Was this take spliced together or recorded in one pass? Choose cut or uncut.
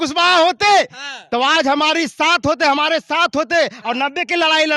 uncut